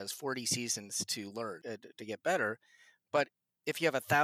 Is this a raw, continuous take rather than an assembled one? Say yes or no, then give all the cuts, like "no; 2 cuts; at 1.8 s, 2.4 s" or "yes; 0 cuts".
no; 1 cut; at 1.6 s